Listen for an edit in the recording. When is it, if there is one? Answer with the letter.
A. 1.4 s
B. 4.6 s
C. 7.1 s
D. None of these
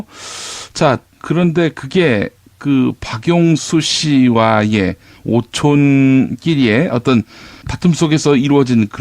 B